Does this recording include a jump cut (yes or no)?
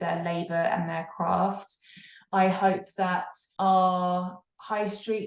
yes